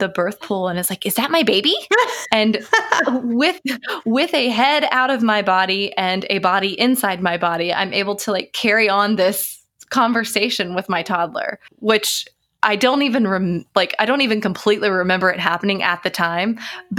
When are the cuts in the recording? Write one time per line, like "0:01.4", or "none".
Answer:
0:11.7